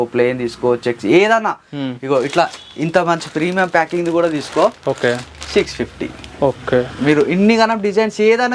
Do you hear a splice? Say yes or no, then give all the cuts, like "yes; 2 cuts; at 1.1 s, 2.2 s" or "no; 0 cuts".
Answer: no; 0 cuts